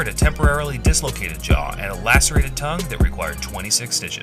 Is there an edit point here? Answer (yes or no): yes